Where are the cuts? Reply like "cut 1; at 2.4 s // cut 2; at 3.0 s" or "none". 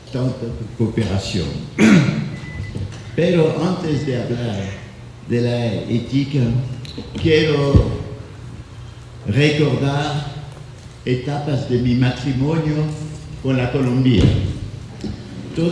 none